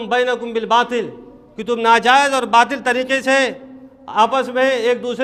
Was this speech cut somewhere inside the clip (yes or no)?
no